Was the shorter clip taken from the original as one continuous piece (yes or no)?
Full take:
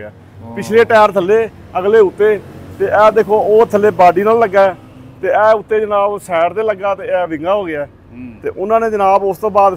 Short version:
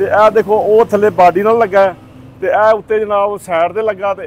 yes